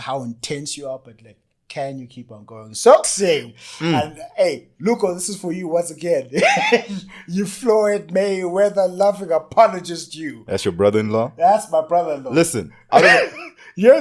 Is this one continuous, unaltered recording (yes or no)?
no